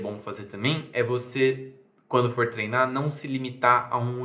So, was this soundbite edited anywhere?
no; 0 cuts

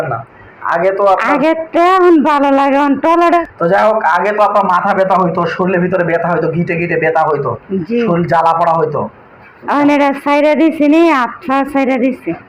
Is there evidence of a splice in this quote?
no; 0 cuts

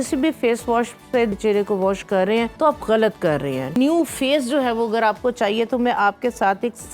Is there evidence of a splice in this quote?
yes; 3 cuts; at 1.3 s, 2.5 s, 3.8 s

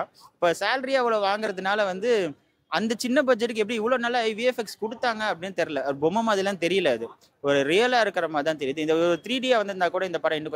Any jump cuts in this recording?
no; 0 cuts

